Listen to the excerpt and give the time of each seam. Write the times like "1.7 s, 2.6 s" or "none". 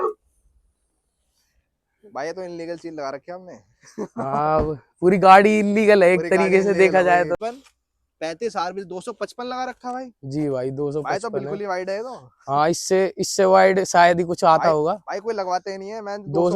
7.3 s